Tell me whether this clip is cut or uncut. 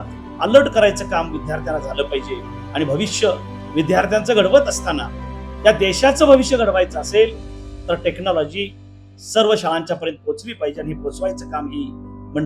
uncut